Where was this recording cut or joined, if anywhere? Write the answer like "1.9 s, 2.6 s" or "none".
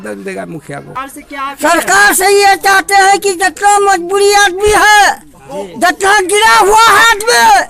1.0 s